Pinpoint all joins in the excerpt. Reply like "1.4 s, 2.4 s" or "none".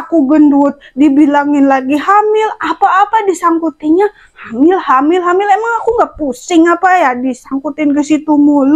none